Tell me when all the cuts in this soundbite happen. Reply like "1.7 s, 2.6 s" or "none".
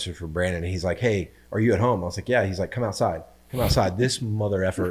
none